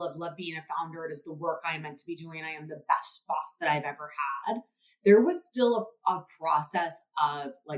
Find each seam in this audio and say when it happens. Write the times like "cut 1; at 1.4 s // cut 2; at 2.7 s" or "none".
none

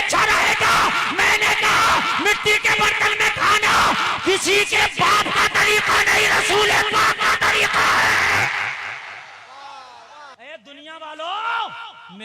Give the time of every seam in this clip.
cut 1; at 10.3 s

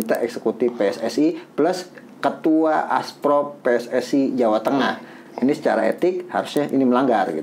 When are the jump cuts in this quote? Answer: none

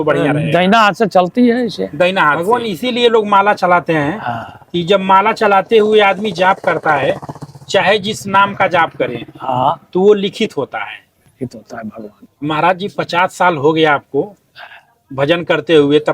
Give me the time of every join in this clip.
cut 1; at 2.4 s // cut 2; at 12.2 s

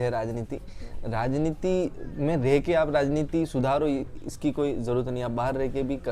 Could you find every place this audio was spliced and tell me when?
none

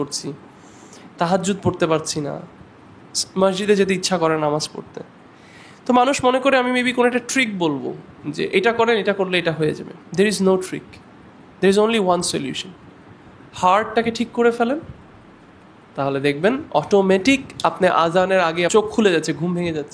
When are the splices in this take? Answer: cut 1; at 18.7 s

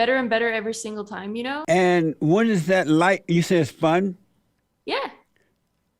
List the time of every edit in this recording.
cut 1; at 1.6 s

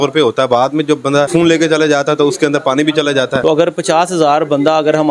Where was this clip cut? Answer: cut 1; at 1.3 s // cut 2; at 3.4 s

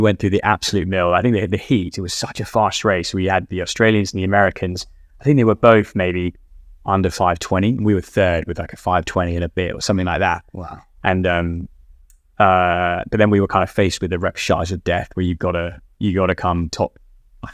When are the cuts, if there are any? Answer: none

